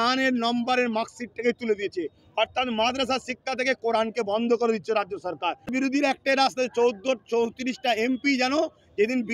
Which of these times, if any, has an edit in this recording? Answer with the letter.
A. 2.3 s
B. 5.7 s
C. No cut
B